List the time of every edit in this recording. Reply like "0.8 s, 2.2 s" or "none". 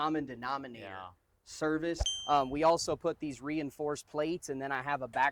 2.1 s